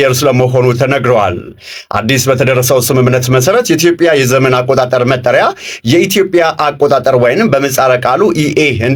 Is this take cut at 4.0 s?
no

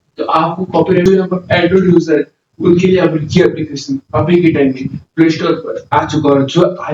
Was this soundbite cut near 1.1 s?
yes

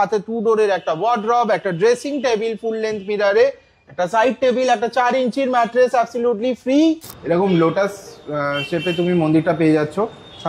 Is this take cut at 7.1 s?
yes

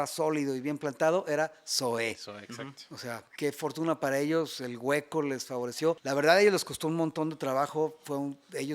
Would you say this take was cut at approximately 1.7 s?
no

